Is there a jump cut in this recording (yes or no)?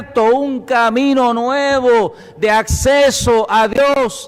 no